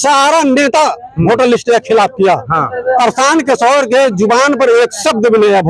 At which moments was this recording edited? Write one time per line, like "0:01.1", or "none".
none